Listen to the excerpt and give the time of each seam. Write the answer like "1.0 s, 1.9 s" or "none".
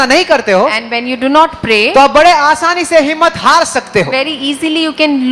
none